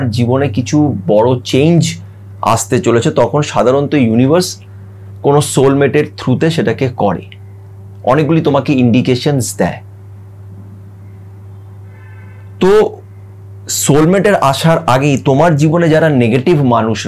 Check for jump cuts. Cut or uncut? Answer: uncut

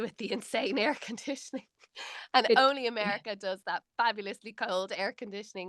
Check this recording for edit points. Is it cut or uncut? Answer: uncut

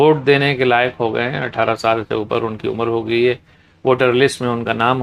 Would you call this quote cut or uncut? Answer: uncut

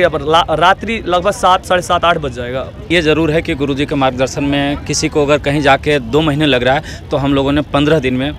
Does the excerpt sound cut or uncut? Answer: cut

